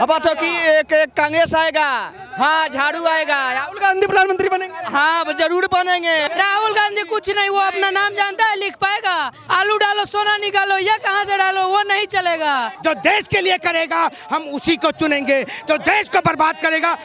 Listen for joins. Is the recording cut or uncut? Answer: cut